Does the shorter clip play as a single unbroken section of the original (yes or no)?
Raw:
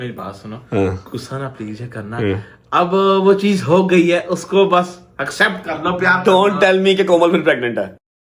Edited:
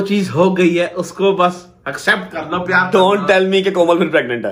yes